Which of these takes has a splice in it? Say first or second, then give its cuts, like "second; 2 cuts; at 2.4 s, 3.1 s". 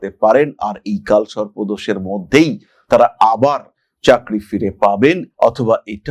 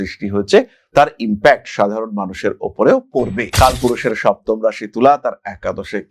second; 1 cut; at 3.5 s